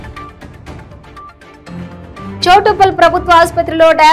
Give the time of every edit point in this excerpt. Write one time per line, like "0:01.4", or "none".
0:02.4